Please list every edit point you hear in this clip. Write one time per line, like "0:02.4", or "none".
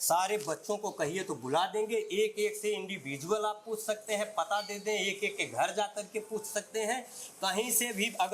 none